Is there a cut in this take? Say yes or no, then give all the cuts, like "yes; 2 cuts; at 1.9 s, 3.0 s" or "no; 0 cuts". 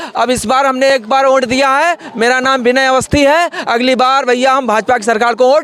no; 0 cuts